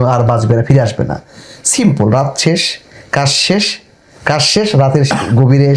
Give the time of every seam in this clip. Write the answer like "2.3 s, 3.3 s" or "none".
none